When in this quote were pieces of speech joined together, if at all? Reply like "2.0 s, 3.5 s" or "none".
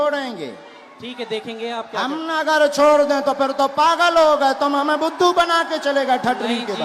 none